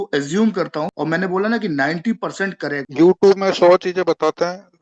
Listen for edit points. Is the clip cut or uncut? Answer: cut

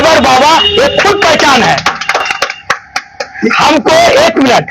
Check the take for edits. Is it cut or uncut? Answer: uncut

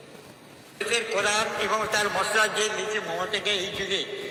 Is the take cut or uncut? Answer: uncut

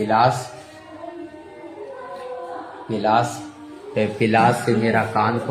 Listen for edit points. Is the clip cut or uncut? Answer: uncut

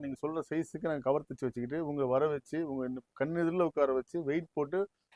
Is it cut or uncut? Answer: uncut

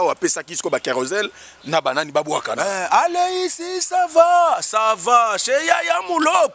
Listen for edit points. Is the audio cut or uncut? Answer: uncut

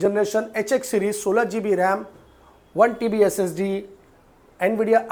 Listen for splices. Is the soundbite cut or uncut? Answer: uncut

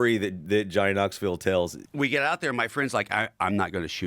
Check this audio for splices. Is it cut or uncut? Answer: cut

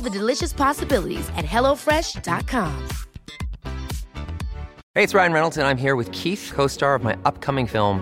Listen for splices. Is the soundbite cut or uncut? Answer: cut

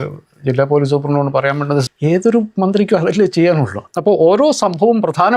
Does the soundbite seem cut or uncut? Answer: cut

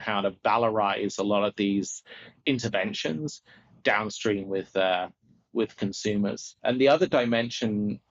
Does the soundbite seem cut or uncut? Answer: cut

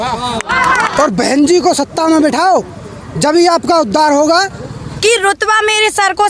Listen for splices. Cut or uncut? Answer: cut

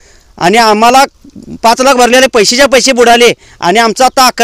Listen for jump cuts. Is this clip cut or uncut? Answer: uncut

